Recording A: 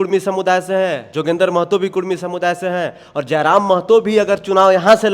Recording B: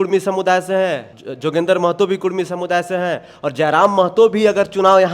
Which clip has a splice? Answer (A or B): A